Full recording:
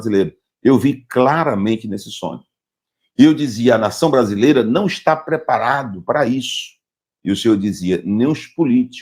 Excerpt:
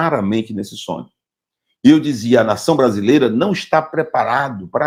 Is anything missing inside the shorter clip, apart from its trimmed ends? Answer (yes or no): no